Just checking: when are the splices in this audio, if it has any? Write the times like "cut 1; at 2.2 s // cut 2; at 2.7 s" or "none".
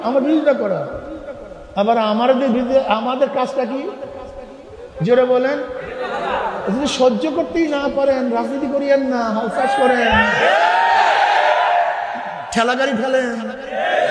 none